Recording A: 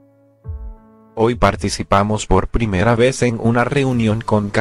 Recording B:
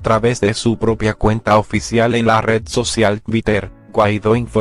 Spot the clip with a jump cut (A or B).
A